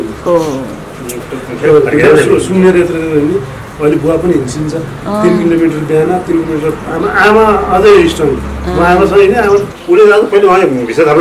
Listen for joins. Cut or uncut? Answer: cut